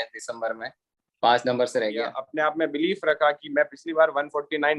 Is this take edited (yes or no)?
yes